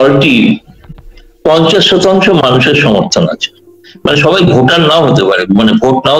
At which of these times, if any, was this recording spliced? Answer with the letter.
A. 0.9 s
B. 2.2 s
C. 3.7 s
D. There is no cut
A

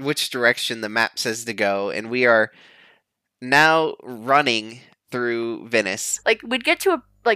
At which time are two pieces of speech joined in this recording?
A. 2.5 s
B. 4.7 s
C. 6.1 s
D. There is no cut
C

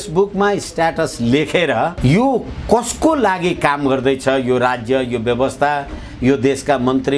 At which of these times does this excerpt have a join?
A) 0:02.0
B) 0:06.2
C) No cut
A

